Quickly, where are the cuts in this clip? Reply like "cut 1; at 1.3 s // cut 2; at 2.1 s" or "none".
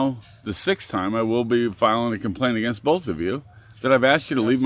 none